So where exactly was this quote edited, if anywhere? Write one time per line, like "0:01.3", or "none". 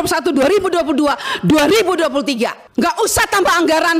none